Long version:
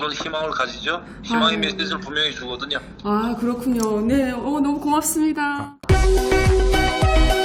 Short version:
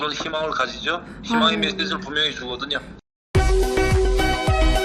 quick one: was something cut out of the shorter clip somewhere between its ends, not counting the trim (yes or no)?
yes